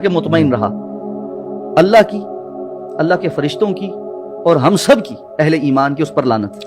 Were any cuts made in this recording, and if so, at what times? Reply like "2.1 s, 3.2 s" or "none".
none